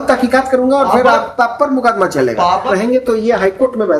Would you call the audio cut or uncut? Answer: cut